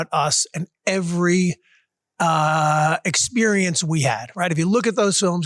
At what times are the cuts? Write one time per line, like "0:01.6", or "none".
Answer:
none